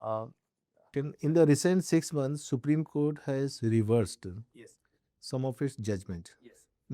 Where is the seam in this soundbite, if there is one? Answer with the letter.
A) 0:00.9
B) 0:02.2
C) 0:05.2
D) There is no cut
A